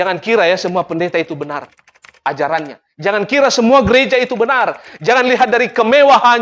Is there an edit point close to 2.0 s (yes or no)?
no